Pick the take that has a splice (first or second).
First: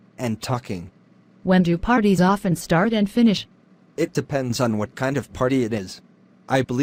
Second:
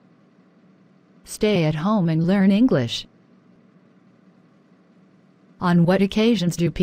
second